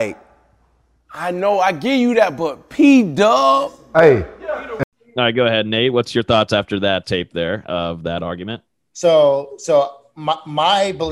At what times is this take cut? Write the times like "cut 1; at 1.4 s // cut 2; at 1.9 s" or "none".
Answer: cut 1; at 4.7 s